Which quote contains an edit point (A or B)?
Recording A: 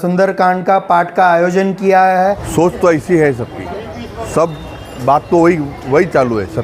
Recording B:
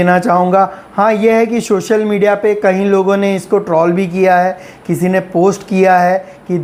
A